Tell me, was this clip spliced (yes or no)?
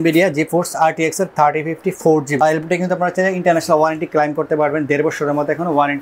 no